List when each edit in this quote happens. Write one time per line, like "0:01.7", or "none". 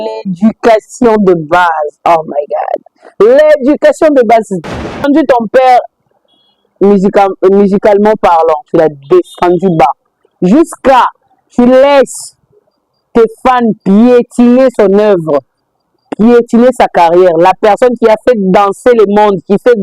0:05.0